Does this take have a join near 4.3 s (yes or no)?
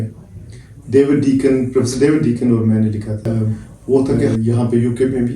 yes